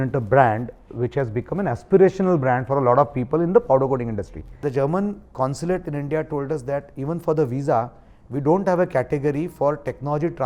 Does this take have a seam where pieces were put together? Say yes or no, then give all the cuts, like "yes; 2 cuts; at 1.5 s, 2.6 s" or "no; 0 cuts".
yes; 1 cut; at 4.6 s